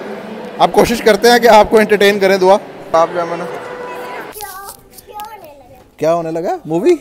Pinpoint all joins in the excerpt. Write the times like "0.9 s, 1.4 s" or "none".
2.8 s, 4.3 s